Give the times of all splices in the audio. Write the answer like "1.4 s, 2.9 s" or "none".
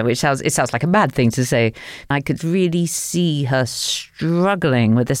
2.1 s